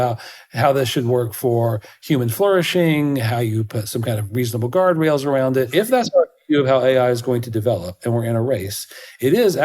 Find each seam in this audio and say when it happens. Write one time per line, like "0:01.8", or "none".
0:05.7